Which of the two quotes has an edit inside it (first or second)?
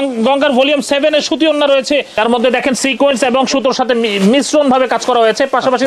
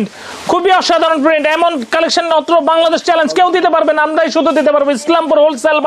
first